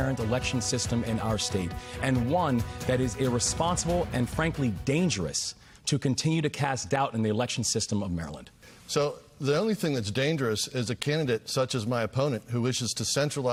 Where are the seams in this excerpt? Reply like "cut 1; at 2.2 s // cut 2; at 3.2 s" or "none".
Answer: none